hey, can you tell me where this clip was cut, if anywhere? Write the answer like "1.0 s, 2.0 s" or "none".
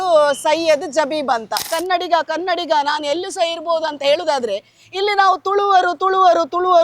1.7 s

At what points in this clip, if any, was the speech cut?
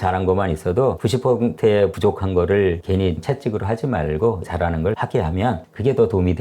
1.9 s, 4.5 s

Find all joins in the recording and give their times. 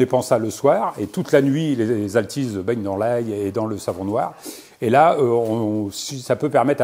none

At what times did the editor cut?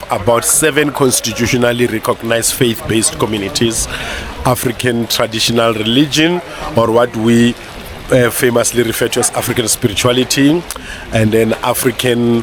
none

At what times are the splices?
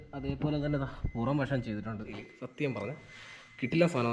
2.2 s

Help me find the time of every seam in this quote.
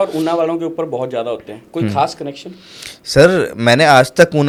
none

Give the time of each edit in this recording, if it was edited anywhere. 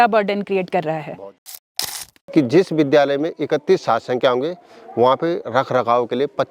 1.8 s

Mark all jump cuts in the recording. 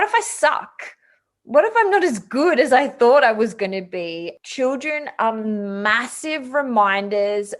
4.3 s

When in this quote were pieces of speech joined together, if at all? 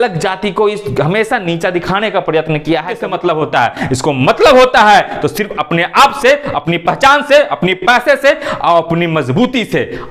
3.0 s

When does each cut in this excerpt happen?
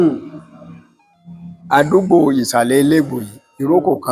none

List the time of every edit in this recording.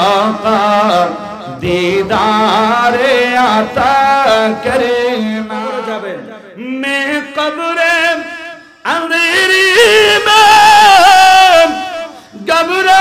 5.5 s

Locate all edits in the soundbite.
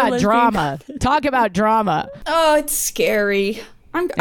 2.2 s

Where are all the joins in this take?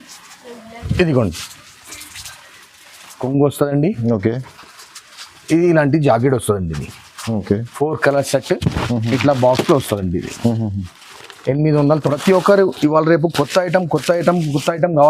3.2 s, 12.1 s

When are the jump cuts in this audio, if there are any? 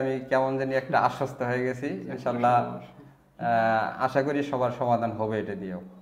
none

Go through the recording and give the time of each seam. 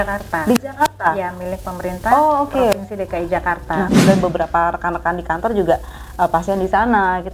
3.9 s

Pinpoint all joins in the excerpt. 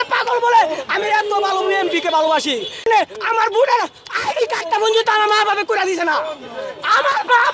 2.9 s

